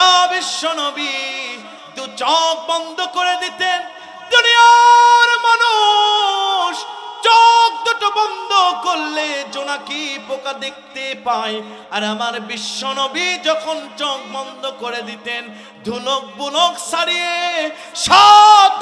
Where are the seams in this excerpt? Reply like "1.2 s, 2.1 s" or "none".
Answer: none